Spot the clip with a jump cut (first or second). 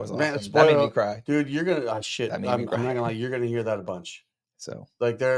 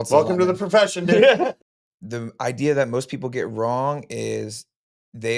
second